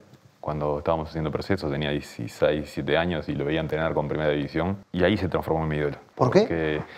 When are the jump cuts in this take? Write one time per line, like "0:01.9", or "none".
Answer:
0:04.8
0:06.0